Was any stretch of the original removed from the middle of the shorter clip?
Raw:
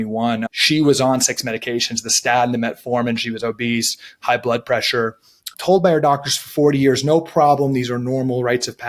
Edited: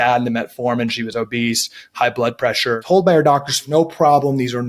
yes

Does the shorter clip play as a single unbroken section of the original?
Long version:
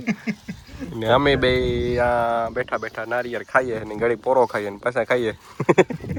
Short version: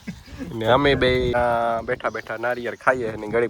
no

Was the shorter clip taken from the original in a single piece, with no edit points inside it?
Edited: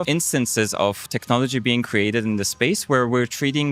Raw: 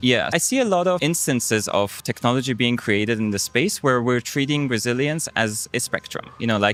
yes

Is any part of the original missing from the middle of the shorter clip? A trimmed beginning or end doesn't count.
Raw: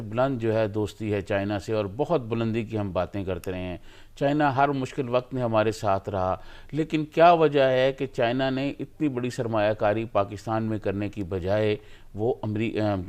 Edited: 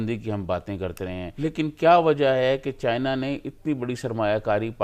yes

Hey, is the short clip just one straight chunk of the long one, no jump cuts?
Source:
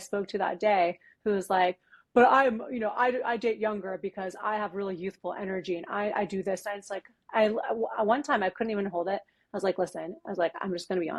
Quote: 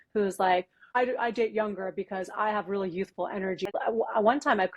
no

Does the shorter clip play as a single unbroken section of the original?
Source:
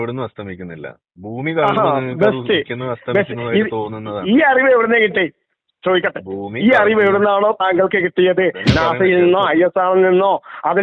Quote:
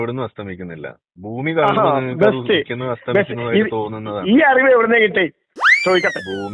yes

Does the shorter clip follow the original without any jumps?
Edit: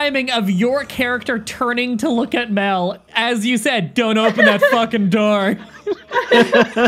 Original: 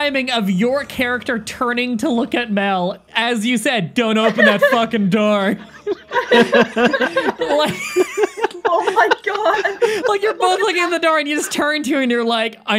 yes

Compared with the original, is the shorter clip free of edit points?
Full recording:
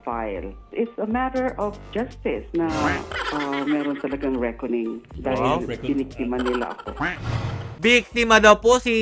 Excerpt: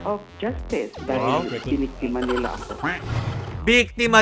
no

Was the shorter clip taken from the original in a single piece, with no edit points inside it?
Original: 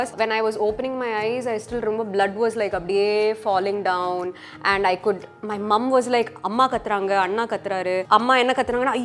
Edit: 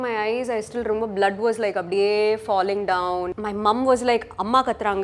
no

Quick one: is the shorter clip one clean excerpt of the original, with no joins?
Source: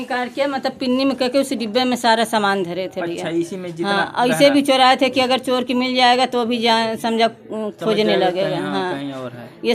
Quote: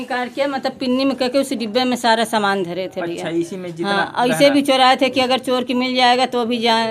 yes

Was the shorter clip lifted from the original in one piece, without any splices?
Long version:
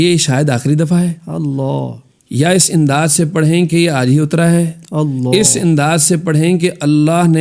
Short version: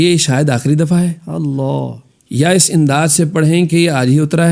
yes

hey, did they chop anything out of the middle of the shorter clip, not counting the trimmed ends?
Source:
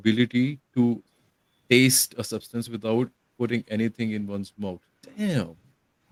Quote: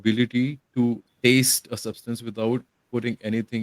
yes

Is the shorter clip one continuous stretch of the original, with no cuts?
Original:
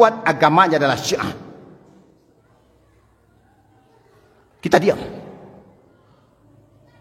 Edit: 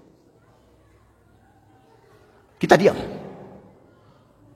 yes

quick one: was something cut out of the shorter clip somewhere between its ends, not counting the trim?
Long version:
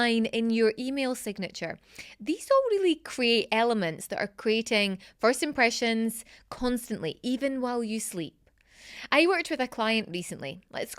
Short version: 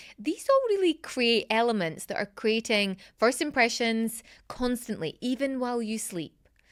no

